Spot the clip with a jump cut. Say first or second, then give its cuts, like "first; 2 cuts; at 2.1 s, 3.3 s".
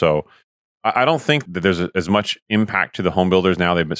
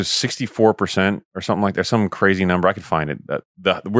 first; 1 cut; at 1.4 s